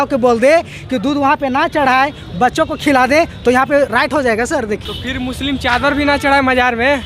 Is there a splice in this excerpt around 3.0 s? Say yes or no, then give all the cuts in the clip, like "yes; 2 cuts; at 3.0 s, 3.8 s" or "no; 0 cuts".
no; 1 cut; at 4.9 s